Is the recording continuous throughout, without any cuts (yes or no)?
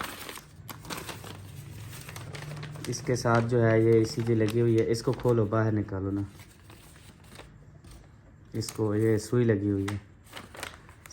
yes